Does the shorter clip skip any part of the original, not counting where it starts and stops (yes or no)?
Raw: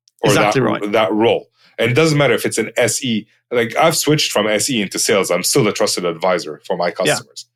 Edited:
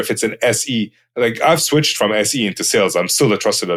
no